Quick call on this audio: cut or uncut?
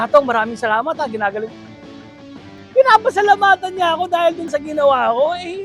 cut